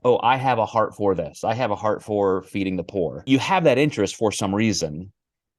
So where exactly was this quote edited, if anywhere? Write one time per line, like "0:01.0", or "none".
0:01.3
0:03.2